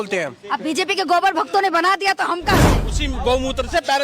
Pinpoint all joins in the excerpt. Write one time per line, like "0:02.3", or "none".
0:02.9